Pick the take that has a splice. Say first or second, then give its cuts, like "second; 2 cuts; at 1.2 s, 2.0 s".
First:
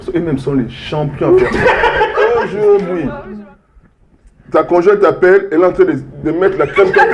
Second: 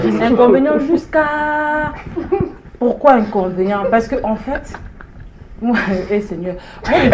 first; 1 cut; at 2.2 s